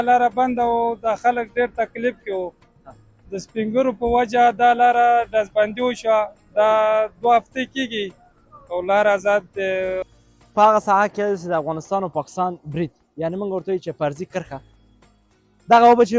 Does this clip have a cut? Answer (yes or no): yes